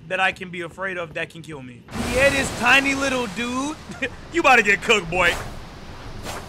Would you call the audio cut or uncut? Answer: cut